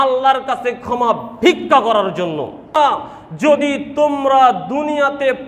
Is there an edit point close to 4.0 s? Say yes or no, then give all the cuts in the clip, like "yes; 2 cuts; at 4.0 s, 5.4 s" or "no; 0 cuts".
no; 1 cut; at 2.8 s